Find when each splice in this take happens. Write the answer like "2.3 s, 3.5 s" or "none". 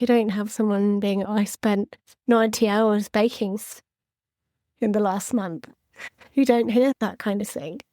1.3 s